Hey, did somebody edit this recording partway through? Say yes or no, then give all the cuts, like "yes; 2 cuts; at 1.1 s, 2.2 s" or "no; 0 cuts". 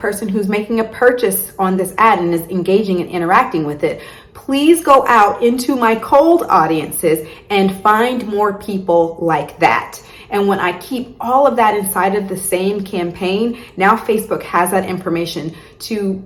no; 0 cuts